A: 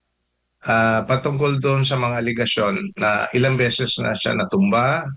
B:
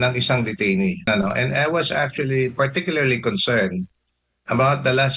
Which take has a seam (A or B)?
B